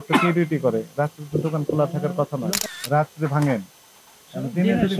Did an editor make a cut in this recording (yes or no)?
yes